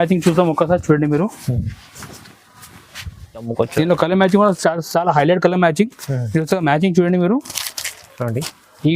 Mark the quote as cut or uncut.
cut